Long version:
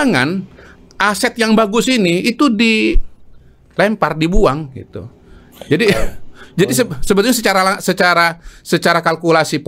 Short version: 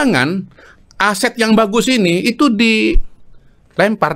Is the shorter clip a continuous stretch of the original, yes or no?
yes